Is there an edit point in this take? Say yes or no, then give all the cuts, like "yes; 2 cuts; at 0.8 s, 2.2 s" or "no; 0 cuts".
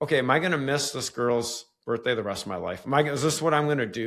no; 0 cuts